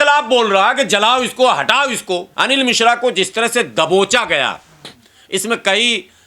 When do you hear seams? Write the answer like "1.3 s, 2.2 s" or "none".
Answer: 2.3 s